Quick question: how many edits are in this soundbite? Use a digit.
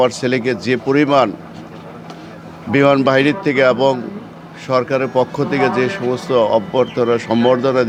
0